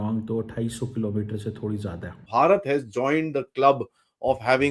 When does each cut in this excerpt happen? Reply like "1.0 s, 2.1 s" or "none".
2.2 s